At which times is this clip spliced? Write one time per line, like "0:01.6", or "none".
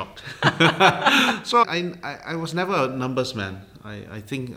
none